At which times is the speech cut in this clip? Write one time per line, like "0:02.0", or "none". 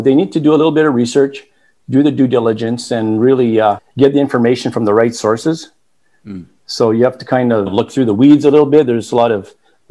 0:03.9
0:07.7